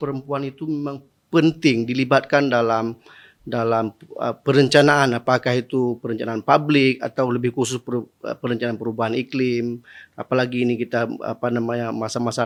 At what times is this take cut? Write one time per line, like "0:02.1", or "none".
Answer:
none

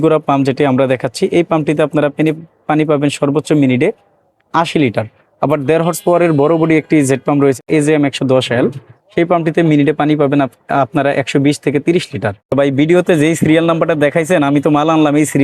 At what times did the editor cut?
0:07.6
0:12.5

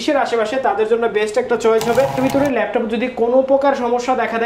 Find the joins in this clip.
0:02.2

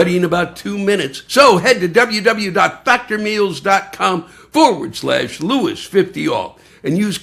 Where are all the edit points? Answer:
0:01.1

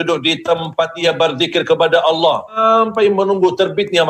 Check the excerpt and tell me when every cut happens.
0:01.0
0:02.6

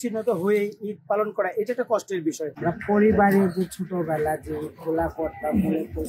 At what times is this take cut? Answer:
0:02.6

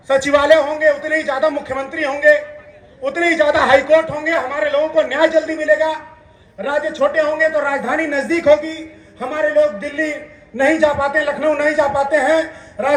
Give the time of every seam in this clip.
none

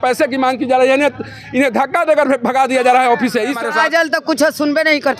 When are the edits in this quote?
0:03.6

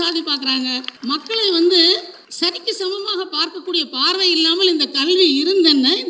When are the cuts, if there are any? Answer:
0:00.9
0:02.2

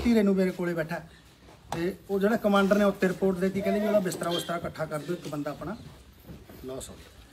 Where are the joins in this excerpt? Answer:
0:03.1

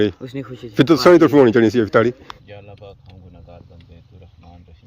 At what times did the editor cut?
0:02.3

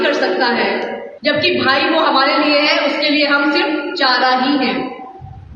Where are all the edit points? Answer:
0:01.0

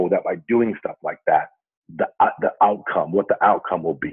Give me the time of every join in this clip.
none

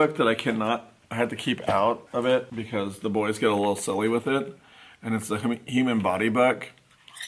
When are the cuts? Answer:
none

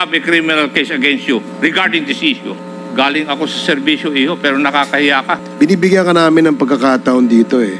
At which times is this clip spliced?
0:02.6
0:05.4

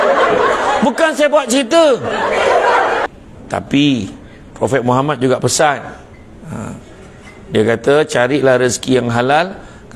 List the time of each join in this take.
0:03.1

